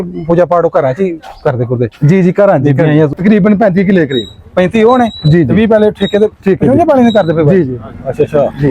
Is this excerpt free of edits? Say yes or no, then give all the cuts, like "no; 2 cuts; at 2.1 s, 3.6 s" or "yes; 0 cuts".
no; 1 cut; at 3.1 s